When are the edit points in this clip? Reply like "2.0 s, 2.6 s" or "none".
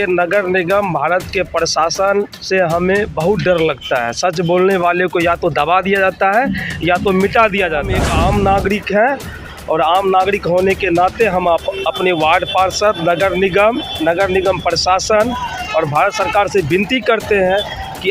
8.0 s